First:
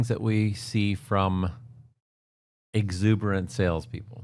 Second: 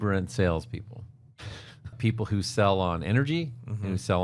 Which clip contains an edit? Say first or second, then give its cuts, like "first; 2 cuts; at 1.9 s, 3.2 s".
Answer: second; 1 cut; at 2.0 s